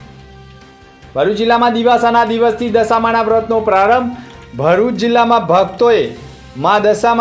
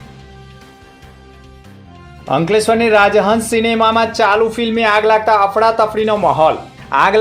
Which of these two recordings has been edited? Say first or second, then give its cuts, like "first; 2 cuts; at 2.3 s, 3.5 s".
second; 1 cut; at 1.0 s